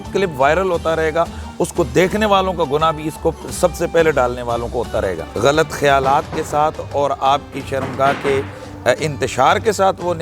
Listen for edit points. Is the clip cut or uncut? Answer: cut